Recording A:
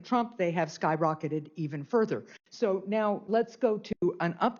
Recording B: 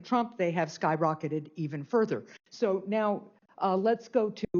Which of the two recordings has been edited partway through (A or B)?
A